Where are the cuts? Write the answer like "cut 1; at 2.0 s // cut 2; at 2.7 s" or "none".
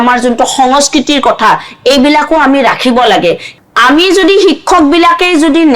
cut 1; at 3.5 s

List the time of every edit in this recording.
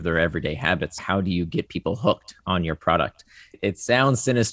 cut 1; at 1.0 s // cut 2; at 3.6 s

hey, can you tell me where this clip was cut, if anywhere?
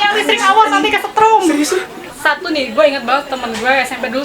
cut 1; at 2.0 s

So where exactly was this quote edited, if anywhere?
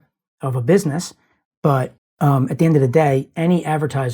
cut 1; at 2.0 s

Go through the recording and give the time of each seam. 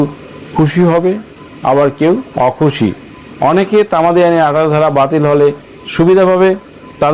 cut 1; at 2.3 s

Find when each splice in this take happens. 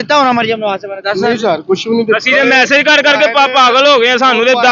none

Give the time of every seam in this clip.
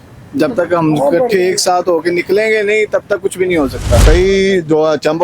cut 1; at 4.0 s

